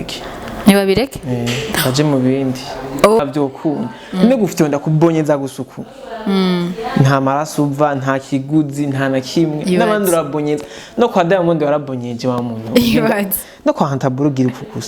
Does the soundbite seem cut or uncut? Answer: cut